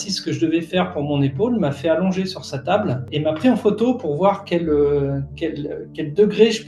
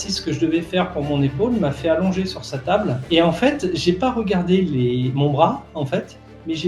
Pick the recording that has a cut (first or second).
second